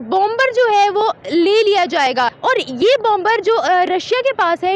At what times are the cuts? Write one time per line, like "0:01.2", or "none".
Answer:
0:02.3